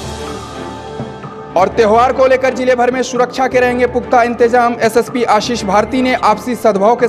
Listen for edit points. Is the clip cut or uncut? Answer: cut